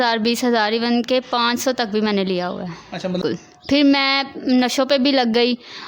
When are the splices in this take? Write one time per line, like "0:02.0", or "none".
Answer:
0:03.2